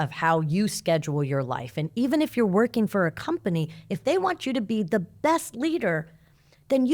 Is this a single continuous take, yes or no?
yes